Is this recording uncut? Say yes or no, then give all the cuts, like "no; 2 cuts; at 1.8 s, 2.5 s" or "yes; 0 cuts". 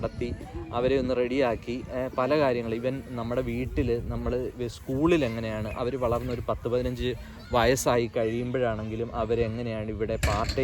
yes; 0 cuts